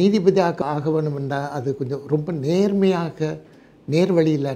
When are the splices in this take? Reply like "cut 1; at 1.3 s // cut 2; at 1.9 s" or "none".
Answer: none